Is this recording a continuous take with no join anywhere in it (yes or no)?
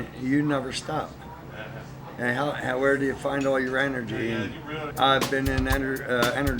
no